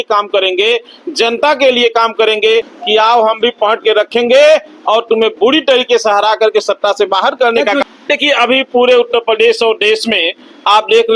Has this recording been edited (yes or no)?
yes